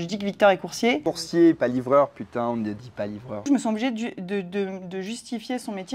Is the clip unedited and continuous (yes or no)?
no